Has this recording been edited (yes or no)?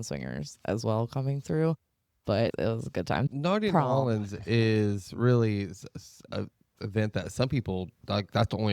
yes